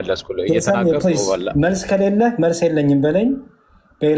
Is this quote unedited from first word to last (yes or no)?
yes